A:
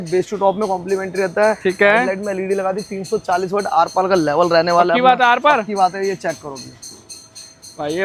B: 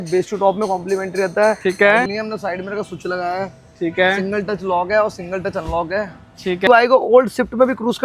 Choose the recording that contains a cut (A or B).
B